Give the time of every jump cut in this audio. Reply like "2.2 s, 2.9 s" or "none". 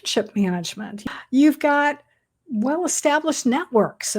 1.0 s